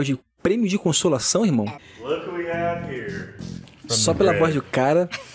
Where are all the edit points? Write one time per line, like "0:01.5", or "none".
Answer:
0:01.9